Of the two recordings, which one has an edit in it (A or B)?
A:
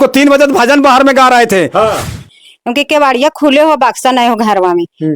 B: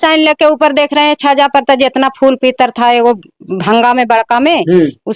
A